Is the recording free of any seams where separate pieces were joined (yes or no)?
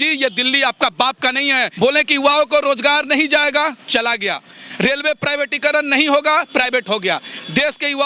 no